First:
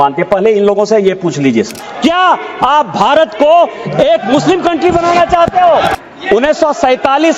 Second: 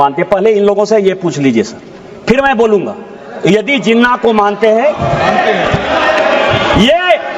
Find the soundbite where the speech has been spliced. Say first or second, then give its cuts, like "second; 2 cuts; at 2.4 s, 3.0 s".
first; 2 cuts; at 1.8 s, 5.9 s